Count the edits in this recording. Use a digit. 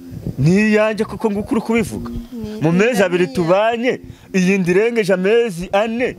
0